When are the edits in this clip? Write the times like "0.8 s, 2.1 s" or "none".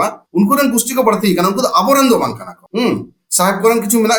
none